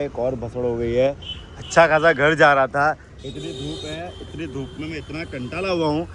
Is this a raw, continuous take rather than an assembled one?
yes; 0 cuts

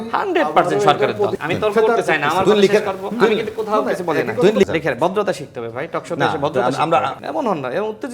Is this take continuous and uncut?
no; 3 cuts; at 1.3 s, 4.6 s, 7.2 s

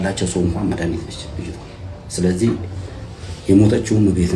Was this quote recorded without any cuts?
yes; 0 cuts

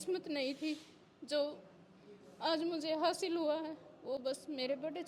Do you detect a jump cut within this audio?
no; 0 cuts

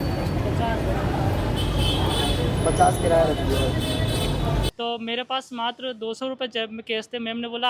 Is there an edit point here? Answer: yes; 1 cut; at 4.6 s

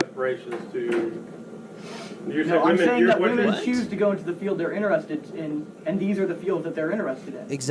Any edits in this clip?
no; 0 cuts

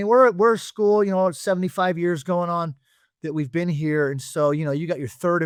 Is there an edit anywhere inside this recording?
no; 0 cuts

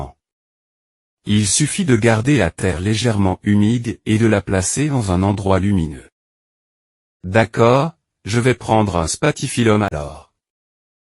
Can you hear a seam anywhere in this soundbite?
yes; 1 cut; at 1.5 s

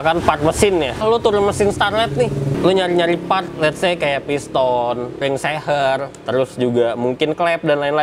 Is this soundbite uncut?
no; 3 cuts; at 1.0 s, 2.5 s, 5.2 s

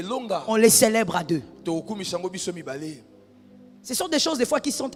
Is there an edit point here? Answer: no; 0 cuts

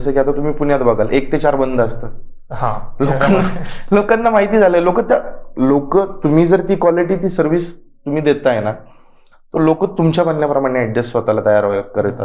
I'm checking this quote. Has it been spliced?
no; 0 cuts

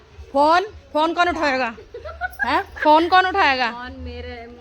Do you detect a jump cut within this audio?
no; 0 cuts

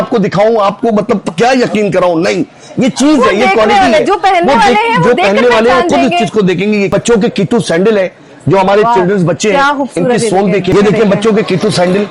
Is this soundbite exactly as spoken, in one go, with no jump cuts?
no; 2 cuts; at 6.9 s, 10.7 s

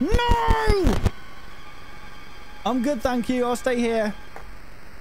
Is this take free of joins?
no; 1 cut; at 1.1 s

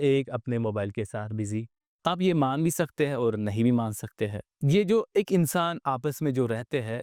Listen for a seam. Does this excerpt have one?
yes; 2 cuts; at 1.8 s, 4.5 s

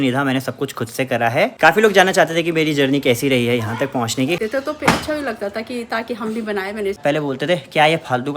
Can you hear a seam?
yes; 3 cuts; at 1.5 s, 4.4 s, 7.0 s

